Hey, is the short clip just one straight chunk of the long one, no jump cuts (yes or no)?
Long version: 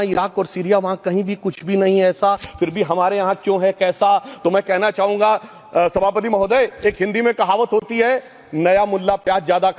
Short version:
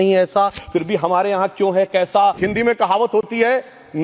no